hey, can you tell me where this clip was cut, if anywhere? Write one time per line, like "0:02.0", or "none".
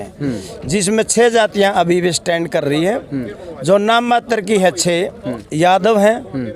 0:05.4